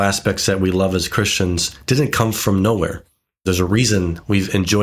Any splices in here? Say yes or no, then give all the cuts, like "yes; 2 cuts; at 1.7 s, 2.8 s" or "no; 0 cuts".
yes; 1 cut; at 3.4 s